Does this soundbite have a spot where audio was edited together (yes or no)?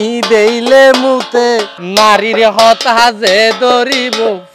yes